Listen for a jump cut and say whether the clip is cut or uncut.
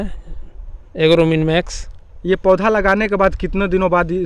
uncut